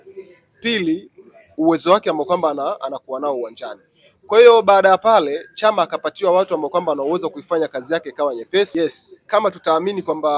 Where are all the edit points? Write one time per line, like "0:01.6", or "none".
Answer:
0:08.7